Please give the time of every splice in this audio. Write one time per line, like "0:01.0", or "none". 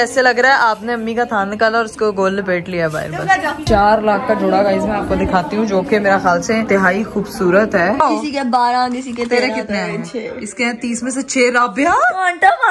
0:03.6
0:06.7
0:08.0